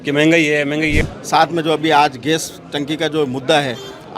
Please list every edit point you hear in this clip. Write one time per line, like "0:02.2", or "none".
0:01.1